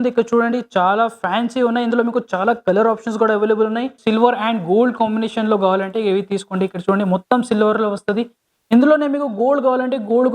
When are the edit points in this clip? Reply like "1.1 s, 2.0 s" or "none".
4.0 s